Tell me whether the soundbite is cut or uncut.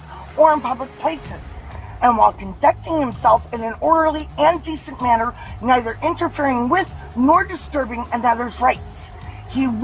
uncut